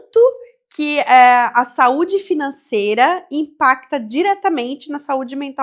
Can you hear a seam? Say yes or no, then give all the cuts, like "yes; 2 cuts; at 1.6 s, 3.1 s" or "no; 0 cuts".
no; 0 cuts